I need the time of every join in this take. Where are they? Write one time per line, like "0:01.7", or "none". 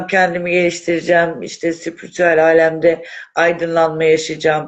none